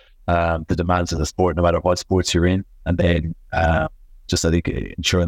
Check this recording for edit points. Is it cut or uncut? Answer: uncut